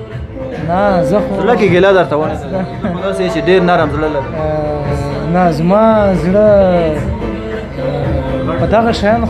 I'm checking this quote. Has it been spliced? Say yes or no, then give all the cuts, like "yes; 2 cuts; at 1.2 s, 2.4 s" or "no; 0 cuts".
no; 0 cuts